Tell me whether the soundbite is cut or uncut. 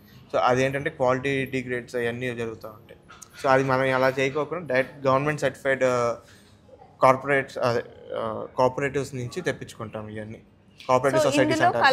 uncut